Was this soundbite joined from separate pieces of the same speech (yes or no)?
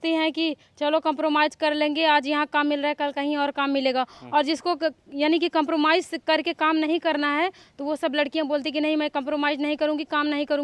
no